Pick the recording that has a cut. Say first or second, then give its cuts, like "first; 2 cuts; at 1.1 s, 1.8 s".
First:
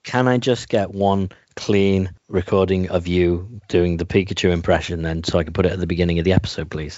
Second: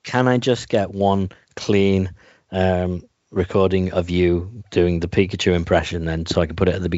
first; 1 cut; at 2.2 s